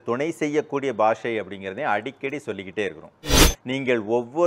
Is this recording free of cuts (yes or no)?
no